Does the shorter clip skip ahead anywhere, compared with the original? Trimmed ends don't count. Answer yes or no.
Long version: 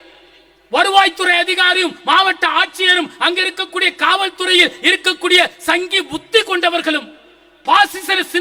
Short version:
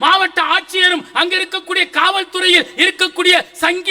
no